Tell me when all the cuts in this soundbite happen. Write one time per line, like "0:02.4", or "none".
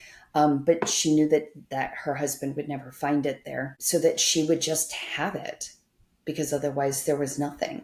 0:03.8